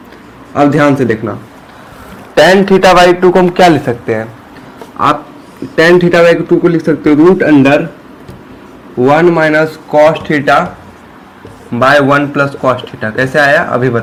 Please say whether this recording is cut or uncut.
uncut